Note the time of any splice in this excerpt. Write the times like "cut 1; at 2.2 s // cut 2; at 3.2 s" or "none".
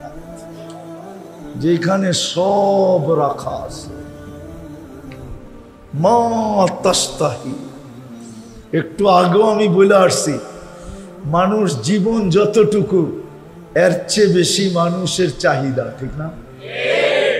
cut 1; at 4.1 s // cut 2; at 5.8 s